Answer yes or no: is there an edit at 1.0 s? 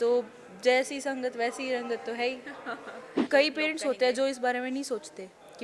no